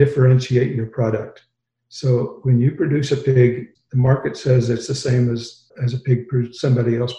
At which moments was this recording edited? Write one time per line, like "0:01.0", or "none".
0:03.7
0:05.7